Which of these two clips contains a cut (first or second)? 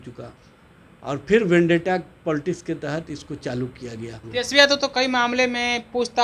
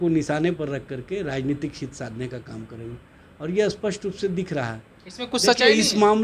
first